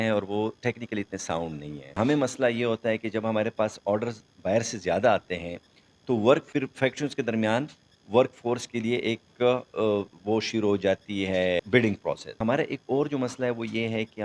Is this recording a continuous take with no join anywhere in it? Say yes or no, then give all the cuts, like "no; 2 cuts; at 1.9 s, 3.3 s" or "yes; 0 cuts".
no; 2 cuts; at 1.9 s, 12.4 s